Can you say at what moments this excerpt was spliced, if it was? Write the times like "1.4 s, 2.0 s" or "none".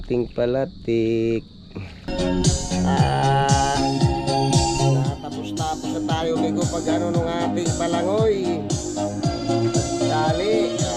2.1 s